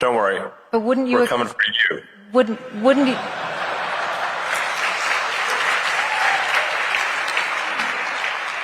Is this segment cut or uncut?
uncut